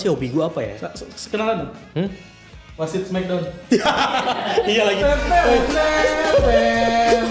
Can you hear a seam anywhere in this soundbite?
no; 0 cuts

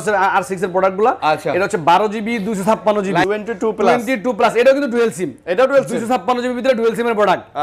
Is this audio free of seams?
no; 1 cut; at 3.2 s

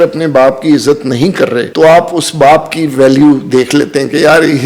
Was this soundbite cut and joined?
yes; 1 cut; at 1.7 s

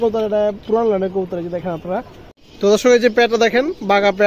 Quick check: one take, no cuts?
no; 1 cut; at 2.4 s

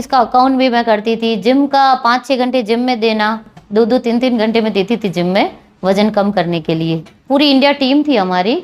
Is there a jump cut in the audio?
yes; 2 cuts; at 3.6 s, 7.2 s

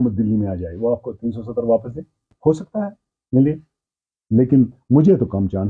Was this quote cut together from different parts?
yes; 1 cut; at 2.3 s

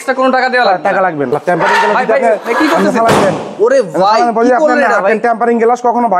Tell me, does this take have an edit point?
yes; 1 cut; at 1.3 s

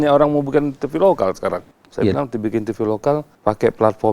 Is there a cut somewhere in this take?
yes; 2 cuts; at 1.8 s, 3.3 s

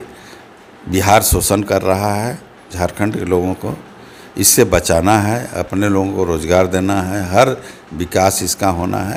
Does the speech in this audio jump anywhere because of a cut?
no; 0 cuts

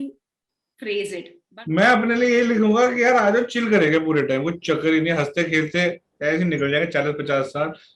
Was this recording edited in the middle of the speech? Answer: yes; 1 cut; at 1.4 s

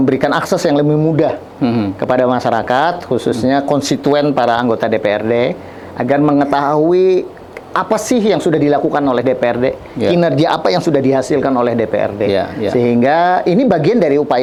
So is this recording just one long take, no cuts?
yes; 0 cuts

